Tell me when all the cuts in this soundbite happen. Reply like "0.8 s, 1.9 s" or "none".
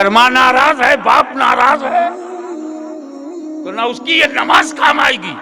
2.2 s, 3.7 s

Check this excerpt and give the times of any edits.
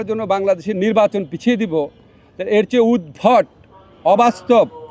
none

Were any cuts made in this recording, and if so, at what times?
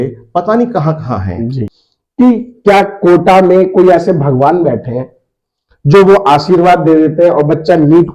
1.5 s

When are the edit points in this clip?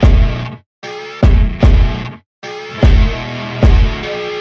none

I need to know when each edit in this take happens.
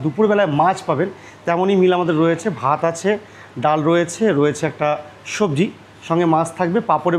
none

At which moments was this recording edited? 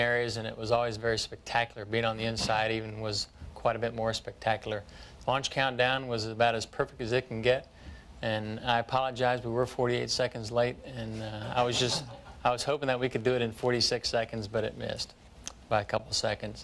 10.9 s

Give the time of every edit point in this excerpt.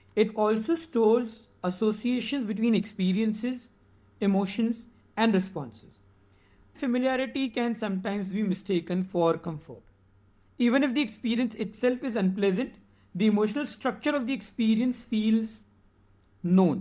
6.8 s

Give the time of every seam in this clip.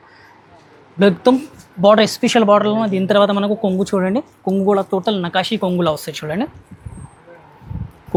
none

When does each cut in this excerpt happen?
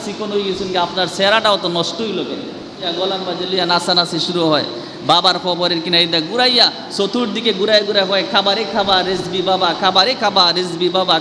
2.9 s

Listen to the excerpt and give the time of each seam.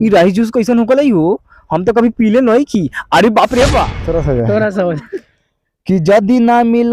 4.0 s

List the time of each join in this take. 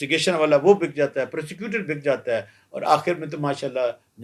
none

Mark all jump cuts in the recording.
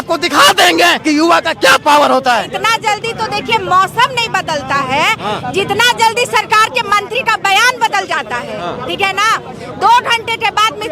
1.0 s, 2.5 s

